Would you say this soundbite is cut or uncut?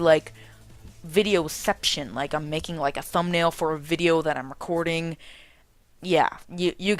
uncut